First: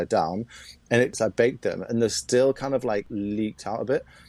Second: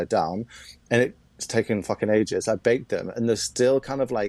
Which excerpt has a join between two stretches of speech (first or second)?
first